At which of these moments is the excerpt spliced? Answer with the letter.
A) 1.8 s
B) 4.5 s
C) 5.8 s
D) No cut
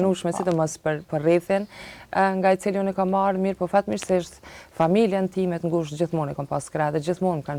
D